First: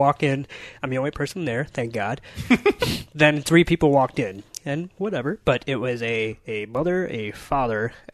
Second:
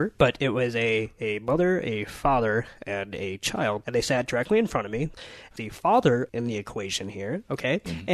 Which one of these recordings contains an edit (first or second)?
second